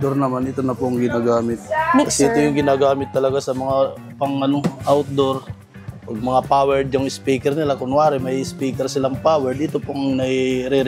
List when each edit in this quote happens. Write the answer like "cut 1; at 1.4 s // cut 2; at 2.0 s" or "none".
cut 1; at 1.6 s